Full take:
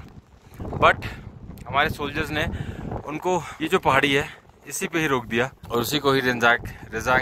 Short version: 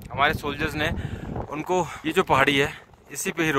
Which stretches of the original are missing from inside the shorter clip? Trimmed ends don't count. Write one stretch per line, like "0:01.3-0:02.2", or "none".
none